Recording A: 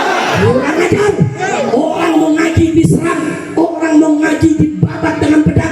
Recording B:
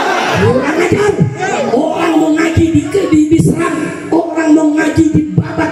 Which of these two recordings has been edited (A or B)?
A